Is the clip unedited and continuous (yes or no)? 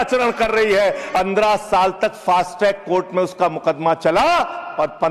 no